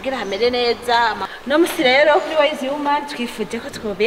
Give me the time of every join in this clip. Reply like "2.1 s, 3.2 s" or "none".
1.3 s